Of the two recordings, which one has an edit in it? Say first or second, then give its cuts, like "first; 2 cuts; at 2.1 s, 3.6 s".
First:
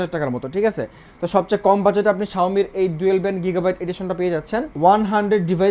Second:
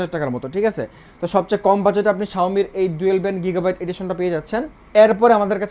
first; 1 cut; at 4.7 s